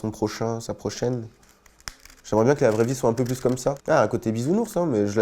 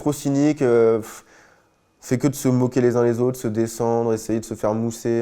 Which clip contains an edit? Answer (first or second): first